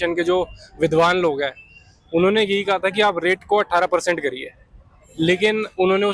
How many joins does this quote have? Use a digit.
0